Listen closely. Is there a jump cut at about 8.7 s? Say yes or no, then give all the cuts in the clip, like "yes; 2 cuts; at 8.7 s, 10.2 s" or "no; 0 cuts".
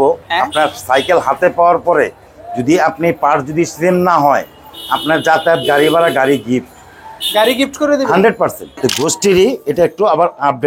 yes; 1 cut; at 8.7 s